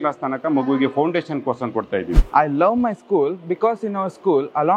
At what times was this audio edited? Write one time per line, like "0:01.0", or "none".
0:02.2